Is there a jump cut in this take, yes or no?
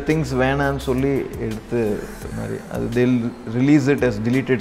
no